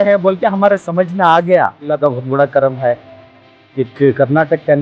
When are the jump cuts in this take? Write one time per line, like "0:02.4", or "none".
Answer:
0:01.8